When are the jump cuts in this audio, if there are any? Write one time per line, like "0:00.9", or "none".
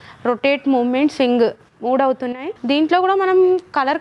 0:02.5